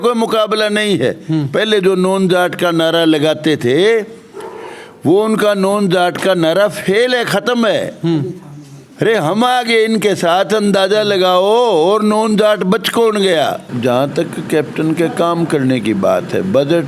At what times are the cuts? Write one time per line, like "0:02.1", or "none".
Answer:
0:13.7